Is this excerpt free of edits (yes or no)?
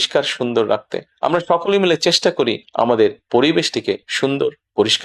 yes